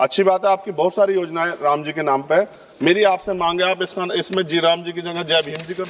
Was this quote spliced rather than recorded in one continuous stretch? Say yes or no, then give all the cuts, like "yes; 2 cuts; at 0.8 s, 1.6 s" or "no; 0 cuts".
no; 0 cuts